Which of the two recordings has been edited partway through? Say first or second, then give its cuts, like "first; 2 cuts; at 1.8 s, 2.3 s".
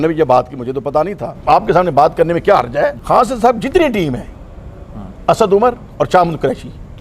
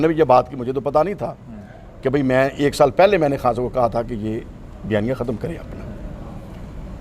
first; 2 cuts; at 1.4 s, 3.0 s